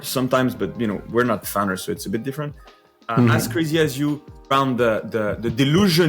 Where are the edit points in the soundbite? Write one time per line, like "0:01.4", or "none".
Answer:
0:04.5